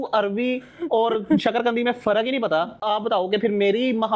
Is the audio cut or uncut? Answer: uncut